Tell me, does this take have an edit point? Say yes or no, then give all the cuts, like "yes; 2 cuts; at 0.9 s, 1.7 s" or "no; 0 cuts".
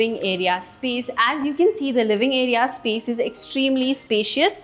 no; 0 cuts